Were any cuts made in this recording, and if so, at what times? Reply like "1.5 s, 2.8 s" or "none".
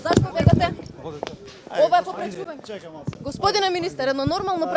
none